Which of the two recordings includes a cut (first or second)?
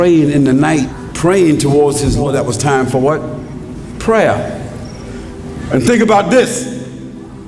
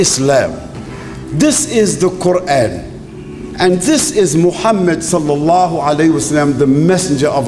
first